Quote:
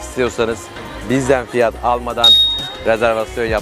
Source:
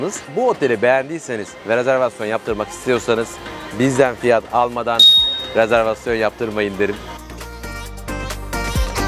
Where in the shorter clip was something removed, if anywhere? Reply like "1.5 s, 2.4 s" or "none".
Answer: none